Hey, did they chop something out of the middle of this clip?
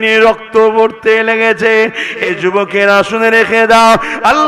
yes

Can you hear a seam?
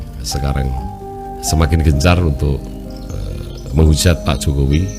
yes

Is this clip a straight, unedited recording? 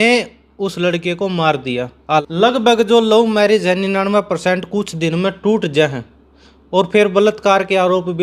no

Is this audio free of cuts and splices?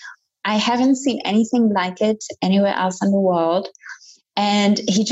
yes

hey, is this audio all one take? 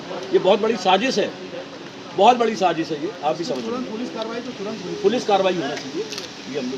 yes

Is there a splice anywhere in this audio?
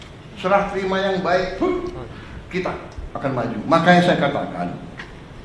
no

